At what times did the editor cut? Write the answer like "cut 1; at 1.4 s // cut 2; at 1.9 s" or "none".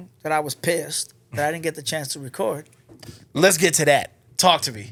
none